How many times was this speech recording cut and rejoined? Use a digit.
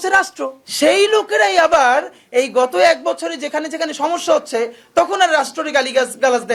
0